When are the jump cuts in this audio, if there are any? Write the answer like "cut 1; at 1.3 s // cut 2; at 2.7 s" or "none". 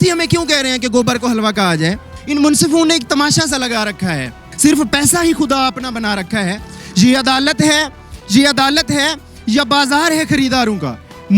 cut 1; at 2.1 s // cut 2; at 4.5 s

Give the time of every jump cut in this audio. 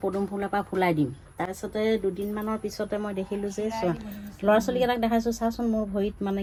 none

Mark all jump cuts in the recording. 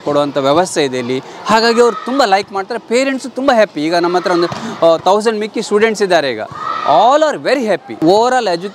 none

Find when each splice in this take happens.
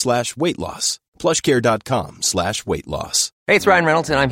cut 1; at 3.3 s

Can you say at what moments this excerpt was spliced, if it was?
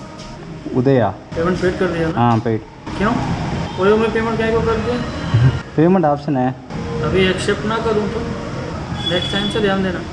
cut 1; at 1.2 s

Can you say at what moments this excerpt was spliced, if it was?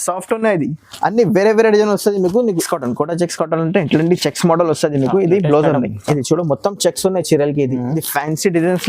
cut 1; at 2.6 s

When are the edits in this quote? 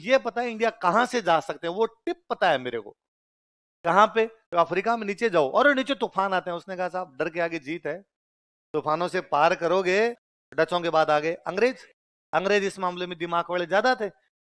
cut 1; at 10.3 s

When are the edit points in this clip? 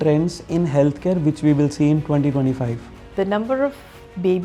cut 1; at 3.1 s

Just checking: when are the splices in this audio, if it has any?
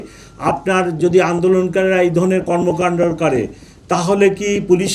none

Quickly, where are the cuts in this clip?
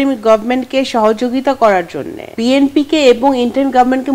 cut 1; at 2.3 s

